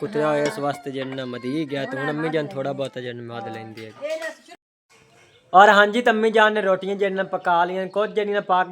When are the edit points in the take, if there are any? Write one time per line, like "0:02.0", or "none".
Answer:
0:04.6